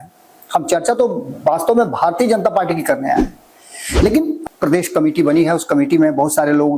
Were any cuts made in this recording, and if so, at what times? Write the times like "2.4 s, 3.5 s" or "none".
4.4 s